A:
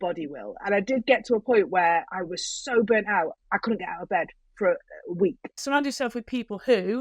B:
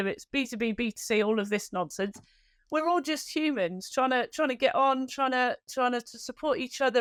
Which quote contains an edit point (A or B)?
A